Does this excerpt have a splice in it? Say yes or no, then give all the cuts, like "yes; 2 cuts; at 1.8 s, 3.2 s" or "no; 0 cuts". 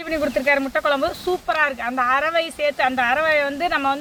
no; 0 cuts